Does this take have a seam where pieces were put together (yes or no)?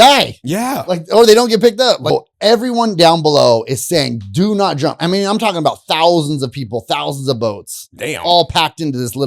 yes